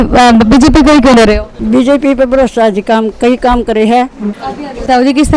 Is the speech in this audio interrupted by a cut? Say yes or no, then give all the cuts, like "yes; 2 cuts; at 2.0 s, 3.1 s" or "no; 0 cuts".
yes; 2 cuts; at 1.1 s, 4.4 s